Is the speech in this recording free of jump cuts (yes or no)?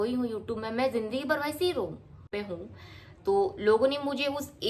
no